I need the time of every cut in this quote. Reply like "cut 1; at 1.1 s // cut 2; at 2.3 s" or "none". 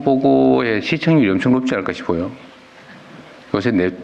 none